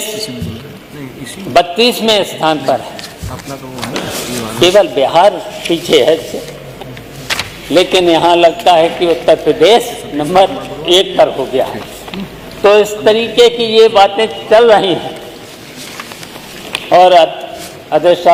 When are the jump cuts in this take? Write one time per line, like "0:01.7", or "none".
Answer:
none